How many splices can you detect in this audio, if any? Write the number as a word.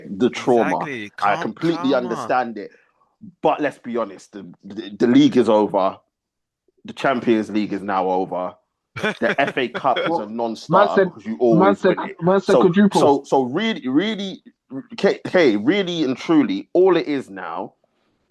zero